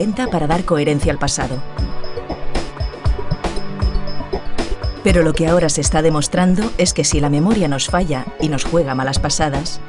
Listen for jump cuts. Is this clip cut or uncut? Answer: uncut